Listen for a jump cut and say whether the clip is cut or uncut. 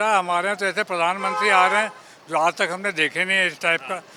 uncut